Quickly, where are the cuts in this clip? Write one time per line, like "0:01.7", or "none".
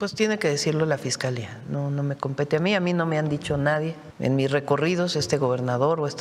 0:04.0